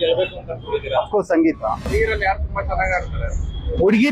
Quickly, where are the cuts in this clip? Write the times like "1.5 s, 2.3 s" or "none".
1.9 s